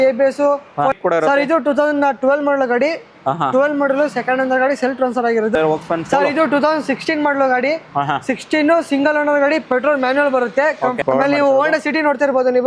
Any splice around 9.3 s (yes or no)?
no